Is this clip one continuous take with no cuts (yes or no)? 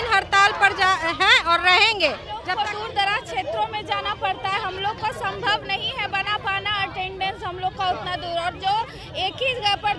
no